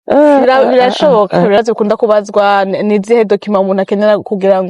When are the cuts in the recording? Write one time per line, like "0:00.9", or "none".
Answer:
0:01.6